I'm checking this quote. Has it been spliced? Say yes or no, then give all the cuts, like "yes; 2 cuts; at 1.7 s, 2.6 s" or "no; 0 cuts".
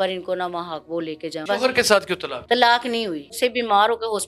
yes; 3 cuts; at 1.5 s, 2.3 s, 3.3 s